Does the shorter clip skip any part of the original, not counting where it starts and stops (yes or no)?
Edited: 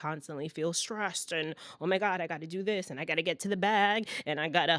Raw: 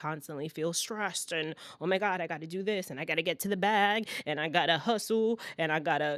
no